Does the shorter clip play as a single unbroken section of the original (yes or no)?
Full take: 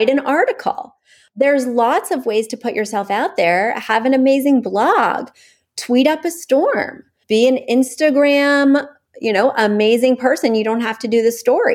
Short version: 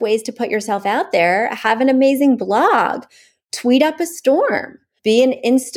yes